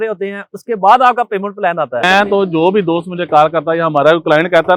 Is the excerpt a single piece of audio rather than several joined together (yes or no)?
no